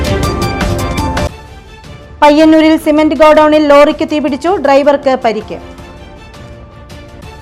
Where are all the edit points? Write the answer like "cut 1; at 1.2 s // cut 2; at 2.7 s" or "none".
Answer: cut 1; at 1.2 s